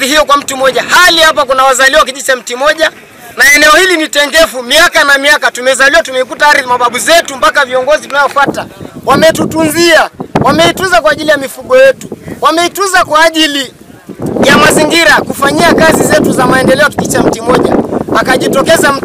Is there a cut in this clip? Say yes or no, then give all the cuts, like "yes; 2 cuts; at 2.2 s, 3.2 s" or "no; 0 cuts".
no; 0 cuts